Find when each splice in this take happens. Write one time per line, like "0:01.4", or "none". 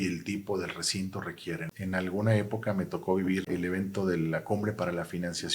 0:01.7
0:03.4